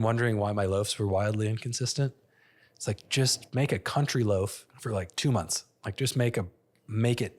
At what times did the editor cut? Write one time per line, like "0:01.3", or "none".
0:03.4
0:04.7